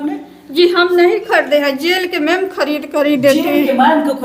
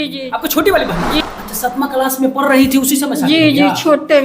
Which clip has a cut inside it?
second; 1 cut; at 1.2 s

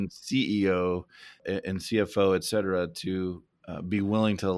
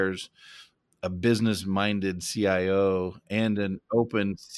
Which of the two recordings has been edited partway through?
first; 2 cuts; at 1.3 s, 3.5 s

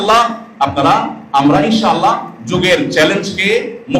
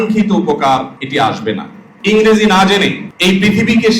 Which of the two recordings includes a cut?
second; 2 cuts; at 1.5 s, 3.1 s

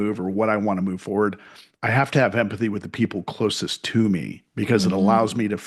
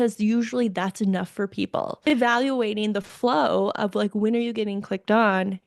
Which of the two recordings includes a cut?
second; 1 cut; at 2.0 s

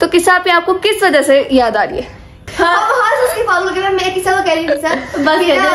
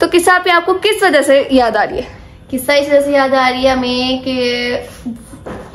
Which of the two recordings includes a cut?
first; 1 cut; at 2.4 s

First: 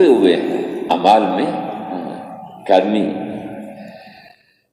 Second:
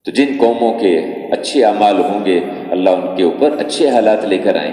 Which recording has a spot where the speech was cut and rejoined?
first; 1 cut; at 0.9 s

